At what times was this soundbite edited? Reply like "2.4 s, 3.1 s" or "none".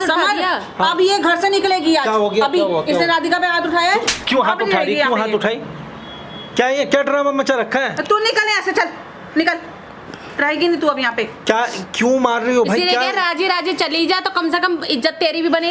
none